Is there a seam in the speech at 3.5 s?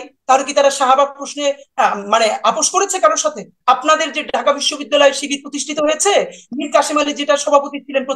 yes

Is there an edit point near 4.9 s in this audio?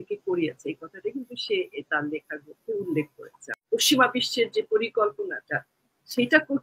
no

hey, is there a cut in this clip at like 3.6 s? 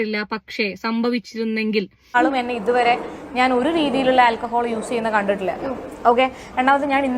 no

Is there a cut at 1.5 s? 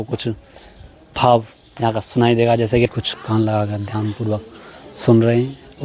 no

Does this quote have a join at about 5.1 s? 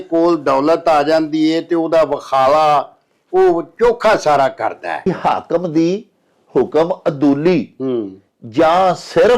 yes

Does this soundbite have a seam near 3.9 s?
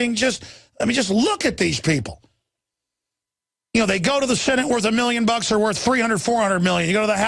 yes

